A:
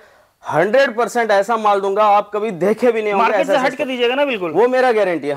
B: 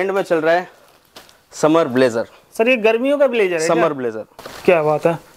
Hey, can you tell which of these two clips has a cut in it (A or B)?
B